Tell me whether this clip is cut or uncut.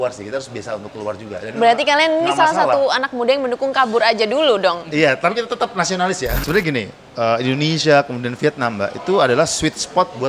cut